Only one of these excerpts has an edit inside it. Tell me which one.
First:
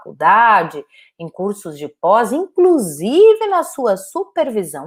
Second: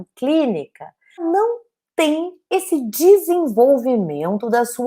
second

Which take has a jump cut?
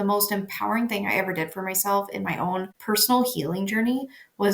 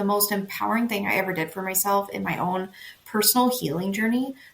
first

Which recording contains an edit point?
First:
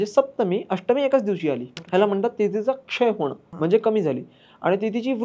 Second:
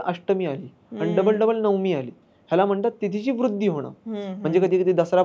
first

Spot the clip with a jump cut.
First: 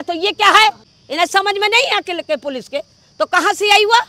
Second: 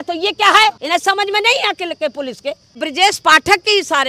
second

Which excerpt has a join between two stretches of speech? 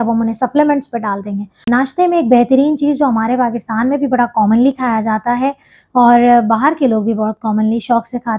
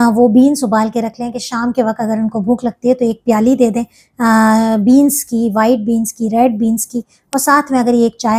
first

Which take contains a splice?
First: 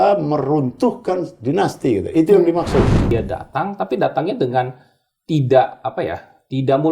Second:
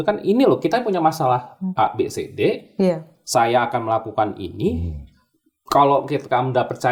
first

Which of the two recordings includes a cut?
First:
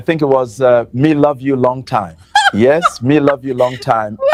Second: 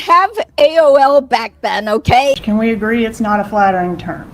second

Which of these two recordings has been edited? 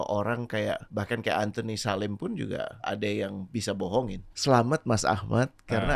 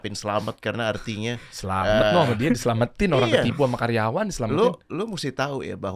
first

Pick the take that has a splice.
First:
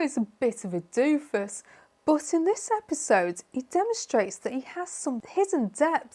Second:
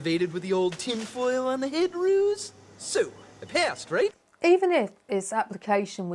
first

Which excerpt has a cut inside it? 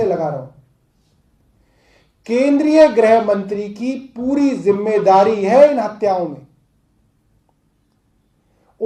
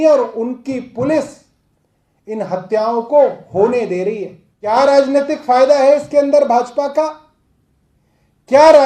second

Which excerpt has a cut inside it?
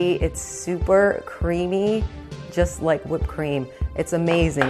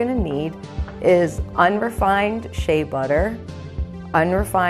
second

